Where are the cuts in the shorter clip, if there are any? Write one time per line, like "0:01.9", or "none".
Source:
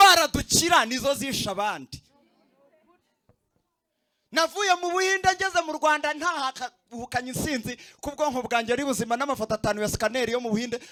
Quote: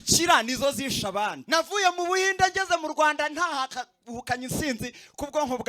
0:01.4